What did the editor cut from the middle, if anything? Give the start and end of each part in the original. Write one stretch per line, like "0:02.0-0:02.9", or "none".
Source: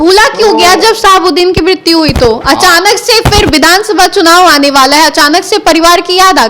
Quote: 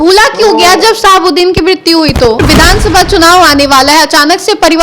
0:02.4-0:03.4